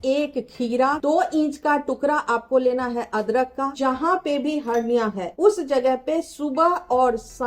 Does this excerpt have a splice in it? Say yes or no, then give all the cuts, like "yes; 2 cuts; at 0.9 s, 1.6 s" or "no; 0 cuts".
yes; 3 cuts; at 1.0 s, 3.8 s, 5.2 s